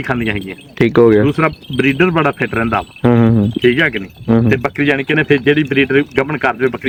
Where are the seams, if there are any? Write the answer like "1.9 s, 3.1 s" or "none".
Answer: none

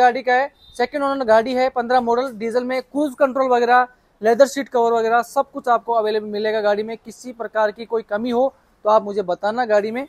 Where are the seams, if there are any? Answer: none

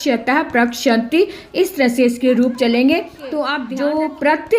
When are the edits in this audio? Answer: 3.6 s

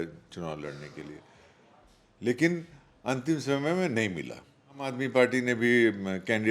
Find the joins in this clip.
4.9 s

